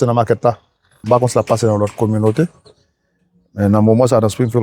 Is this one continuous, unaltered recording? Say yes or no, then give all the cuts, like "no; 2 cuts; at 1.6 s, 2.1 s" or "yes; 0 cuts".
no; 1 cut; at 1.0 s